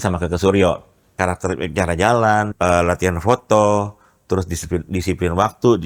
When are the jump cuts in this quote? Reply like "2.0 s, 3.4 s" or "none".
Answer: 1.1 s, 2.5 s